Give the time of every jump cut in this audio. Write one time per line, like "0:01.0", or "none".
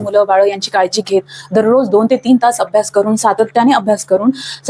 none